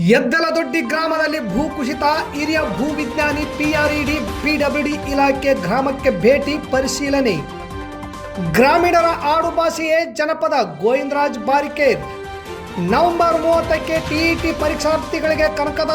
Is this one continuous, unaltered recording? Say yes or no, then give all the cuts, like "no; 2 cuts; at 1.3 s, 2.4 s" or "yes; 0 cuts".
yes; 0 cuts